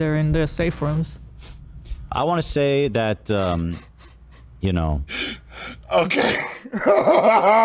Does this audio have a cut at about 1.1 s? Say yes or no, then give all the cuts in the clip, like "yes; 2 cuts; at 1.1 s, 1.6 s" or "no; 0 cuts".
no; 0 cuts